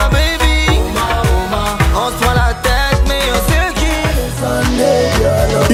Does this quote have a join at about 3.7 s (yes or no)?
no